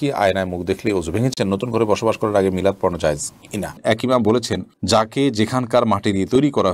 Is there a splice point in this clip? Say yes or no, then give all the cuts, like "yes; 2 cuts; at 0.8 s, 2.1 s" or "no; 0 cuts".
yes; 2 cuts; at 1.3 s, 3.7 s